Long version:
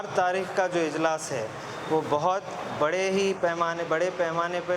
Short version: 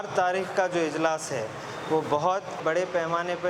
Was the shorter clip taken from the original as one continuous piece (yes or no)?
no